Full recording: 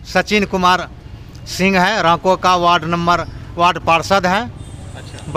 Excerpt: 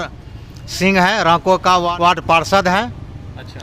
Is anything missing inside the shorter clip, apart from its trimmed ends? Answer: yes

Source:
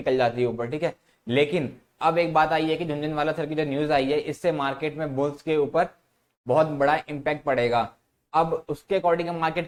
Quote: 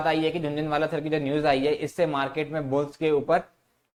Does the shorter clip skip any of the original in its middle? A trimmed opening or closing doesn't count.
no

